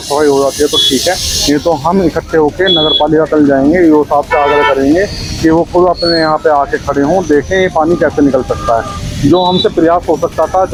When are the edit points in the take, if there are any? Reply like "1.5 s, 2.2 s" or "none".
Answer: none